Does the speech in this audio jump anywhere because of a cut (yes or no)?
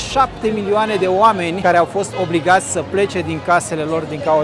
yes